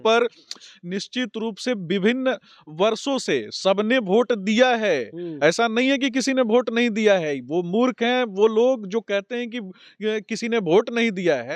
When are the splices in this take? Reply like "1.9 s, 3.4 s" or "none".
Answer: none